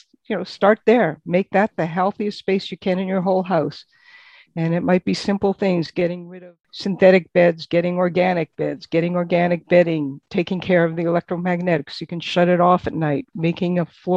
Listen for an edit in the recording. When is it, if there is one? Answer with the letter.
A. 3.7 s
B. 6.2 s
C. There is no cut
B